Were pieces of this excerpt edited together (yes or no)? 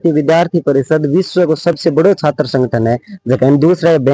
no